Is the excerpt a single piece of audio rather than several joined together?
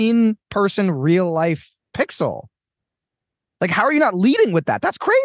no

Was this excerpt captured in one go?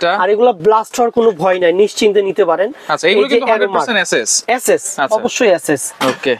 yes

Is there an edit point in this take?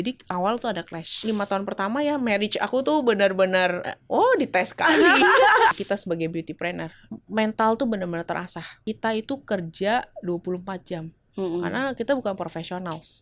yes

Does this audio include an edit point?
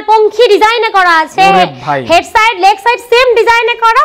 no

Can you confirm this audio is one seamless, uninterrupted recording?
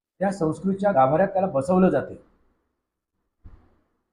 no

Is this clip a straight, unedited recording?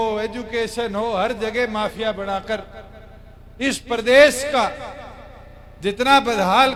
yes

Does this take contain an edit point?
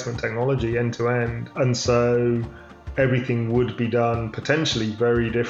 no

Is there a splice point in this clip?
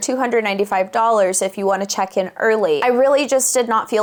no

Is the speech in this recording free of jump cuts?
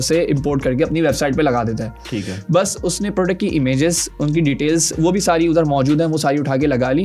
yes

